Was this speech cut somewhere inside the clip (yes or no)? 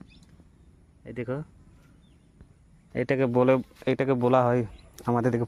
yes